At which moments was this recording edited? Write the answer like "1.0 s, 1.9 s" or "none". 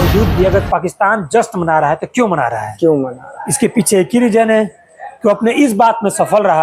none